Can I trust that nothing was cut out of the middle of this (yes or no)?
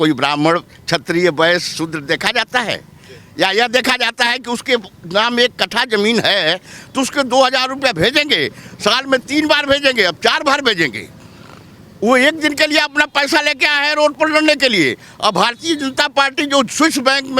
yes